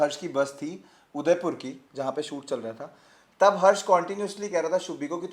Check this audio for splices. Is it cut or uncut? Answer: uncut